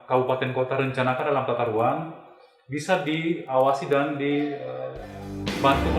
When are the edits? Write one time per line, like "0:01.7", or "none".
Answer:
none